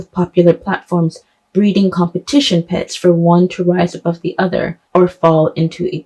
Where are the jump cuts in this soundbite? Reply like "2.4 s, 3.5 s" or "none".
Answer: none

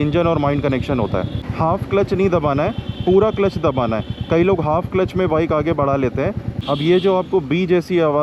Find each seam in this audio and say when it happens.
1.5 s, 6.5 s

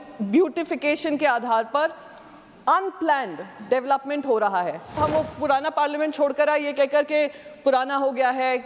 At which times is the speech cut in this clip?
5.0 s

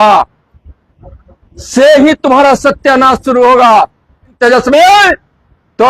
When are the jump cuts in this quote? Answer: 4.4 s

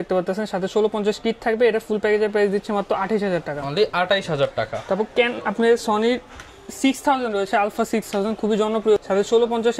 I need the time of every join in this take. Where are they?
none

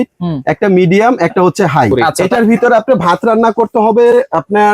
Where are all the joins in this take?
2.2 s

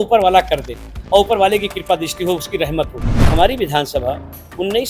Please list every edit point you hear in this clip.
3.2 s

